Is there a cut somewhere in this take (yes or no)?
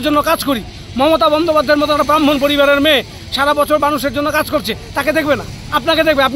no